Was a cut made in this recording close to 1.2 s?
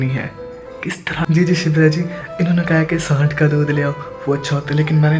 yes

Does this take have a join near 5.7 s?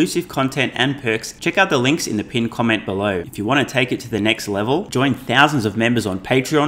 no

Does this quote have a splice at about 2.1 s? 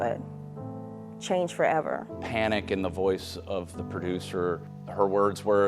yes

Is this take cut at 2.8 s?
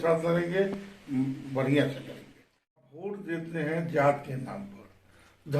yes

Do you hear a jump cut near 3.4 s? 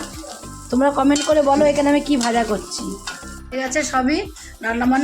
yes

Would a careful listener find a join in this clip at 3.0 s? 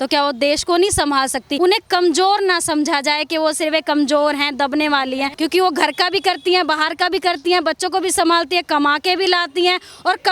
no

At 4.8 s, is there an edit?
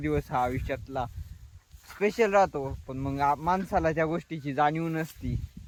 no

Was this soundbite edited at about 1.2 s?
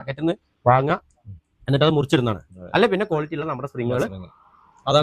no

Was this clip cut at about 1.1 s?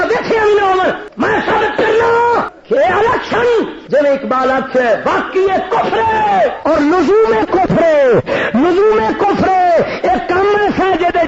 yes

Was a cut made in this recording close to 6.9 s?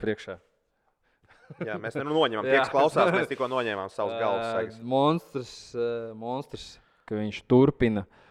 no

